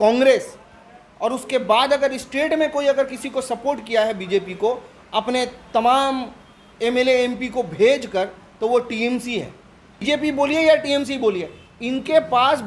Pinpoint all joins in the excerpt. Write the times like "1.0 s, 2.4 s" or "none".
10.0 s